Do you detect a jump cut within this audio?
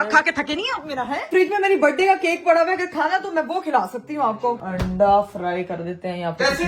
yes; 2 cuts; at 1.2 s, 4.6 s

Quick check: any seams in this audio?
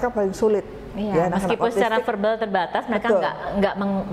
no; 0 cuts

